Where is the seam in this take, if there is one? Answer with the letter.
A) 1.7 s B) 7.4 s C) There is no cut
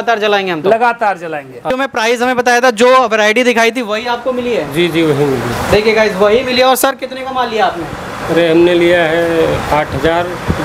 A